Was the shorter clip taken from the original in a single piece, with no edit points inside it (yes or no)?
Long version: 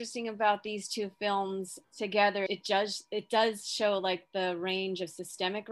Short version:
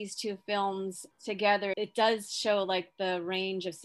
no